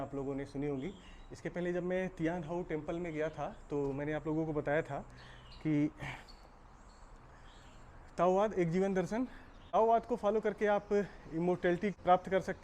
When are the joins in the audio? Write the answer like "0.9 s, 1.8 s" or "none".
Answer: none